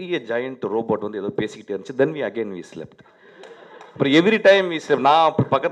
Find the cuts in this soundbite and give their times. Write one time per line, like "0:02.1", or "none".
none